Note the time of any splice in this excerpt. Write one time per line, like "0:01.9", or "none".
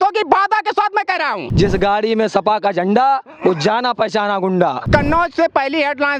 0:01.4
0:04.8